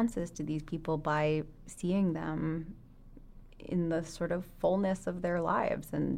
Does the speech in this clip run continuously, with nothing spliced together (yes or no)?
yes